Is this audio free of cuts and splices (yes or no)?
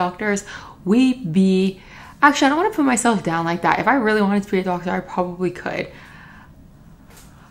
yes